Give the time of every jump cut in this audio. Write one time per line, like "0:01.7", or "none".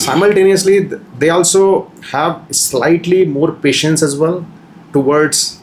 none